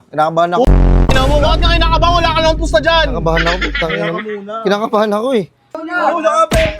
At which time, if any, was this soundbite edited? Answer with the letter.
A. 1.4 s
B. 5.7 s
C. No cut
B